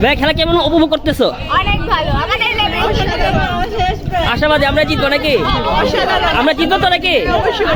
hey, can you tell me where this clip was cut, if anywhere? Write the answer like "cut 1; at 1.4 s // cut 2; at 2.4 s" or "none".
none